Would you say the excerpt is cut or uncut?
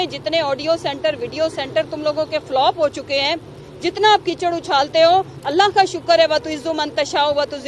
uncut